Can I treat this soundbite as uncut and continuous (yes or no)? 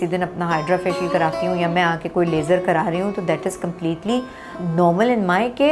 no